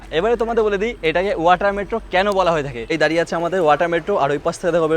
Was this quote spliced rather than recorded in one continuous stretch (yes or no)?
yes